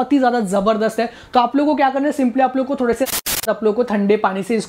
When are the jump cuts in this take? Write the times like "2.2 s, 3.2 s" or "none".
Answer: 3.4 s